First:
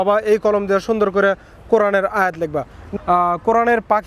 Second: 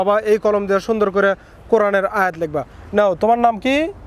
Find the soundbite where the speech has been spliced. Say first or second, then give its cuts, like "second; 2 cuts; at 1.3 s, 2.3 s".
first; 1 cut; at 2.8 s